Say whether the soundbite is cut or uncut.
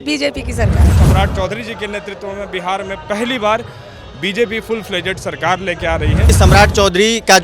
cut